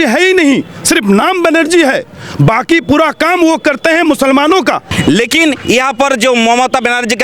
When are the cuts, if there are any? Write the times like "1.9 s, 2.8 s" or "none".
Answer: 4.9 s

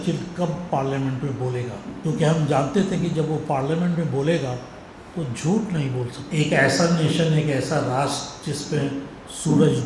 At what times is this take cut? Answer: 1.9 s, 6.2 s

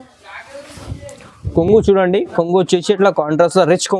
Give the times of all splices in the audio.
none

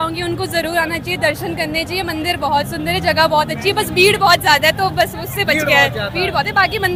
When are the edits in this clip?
none

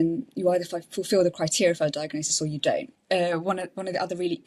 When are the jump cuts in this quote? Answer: 2.9 s

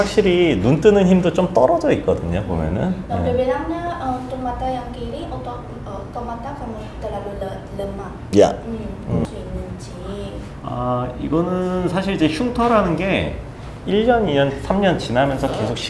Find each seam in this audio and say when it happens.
9.2 s

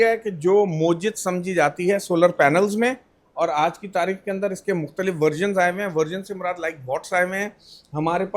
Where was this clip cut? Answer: none

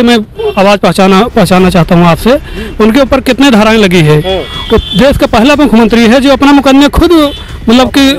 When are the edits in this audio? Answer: none

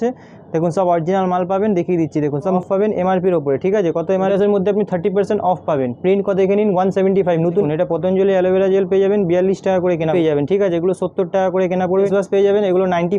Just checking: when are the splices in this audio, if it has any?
2.6 s, 4.3 s, 7.7 s, 10.1 s, 12.1 s

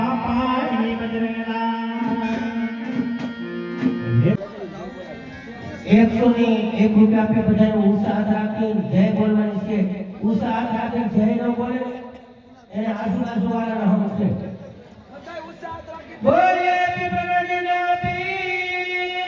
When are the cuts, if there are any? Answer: 4.4 s

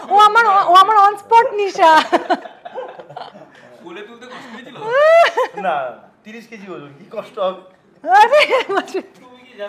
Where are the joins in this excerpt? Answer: none

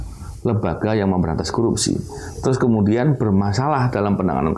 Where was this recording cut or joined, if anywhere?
none

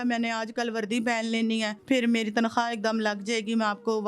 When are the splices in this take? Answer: 1.8 s

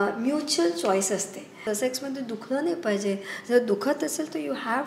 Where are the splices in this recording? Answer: 1.6 s

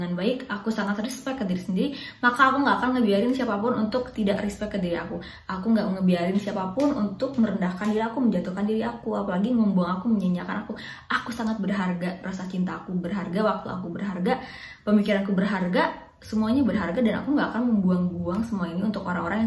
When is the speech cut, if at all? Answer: none

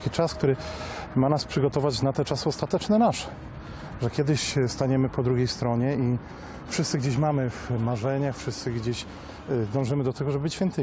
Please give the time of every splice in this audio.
none

